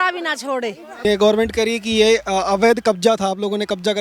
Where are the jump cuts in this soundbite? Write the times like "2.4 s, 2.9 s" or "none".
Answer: 1.0 s